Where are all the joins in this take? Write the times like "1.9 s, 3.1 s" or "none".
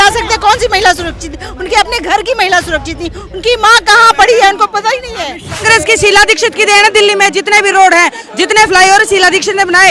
5.6 s